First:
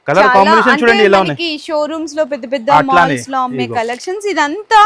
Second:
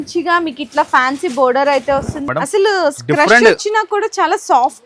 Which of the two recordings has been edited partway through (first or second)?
second